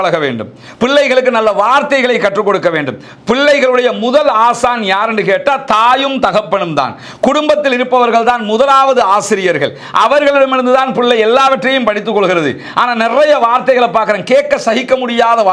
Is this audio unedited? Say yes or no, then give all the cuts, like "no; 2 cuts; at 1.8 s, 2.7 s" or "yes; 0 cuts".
yes; 0 cuts